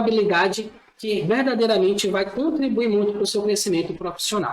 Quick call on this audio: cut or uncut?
uncut